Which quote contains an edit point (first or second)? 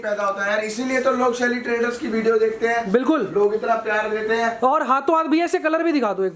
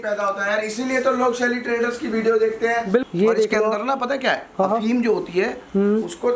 second